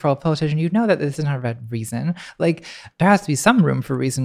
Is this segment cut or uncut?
cut